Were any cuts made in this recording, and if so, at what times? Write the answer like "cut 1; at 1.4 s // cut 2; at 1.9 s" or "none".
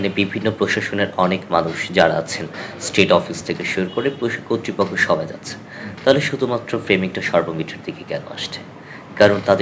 none